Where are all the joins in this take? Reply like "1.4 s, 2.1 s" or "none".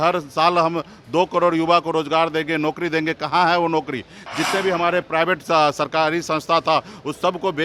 none